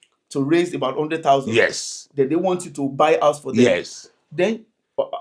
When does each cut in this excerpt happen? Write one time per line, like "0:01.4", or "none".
none